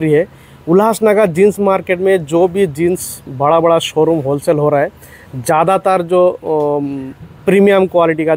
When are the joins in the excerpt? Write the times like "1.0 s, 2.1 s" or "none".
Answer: none